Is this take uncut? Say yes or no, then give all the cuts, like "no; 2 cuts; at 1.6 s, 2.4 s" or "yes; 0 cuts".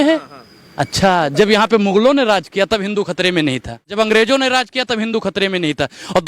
no; 1 cut; at 3.9 s